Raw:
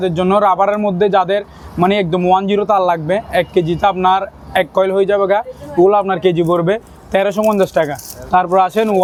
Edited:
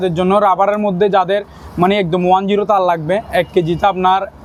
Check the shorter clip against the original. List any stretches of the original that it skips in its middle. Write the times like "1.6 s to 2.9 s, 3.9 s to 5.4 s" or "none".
none